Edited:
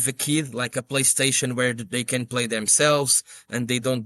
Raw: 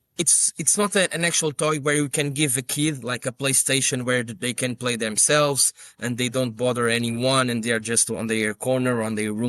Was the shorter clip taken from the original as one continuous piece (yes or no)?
yes